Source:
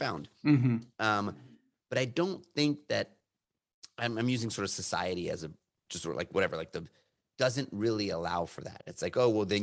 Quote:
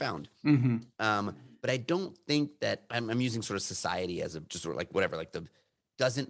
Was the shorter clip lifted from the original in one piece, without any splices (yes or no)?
no